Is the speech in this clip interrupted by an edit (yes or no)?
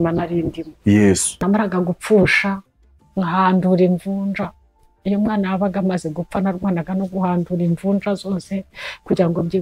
yes